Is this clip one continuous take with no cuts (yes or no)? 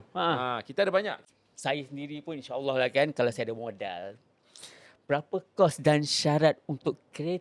no